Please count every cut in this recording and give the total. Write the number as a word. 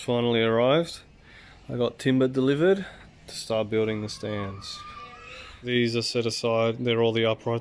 zero